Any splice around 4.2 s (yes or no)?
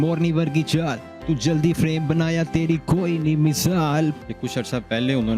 yes